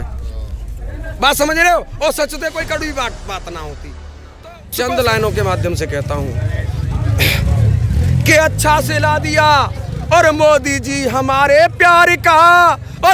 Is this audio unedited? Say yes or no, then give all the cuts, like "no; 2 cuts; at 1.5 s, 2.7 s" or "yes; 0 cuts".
no; 1 cut; at 4.3 s